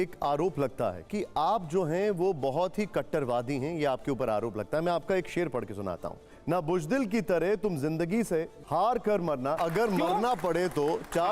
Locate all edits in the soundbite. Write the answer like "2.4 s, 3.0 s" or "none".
1.0 s, 6.3 s, 8.6 s, 9.6 s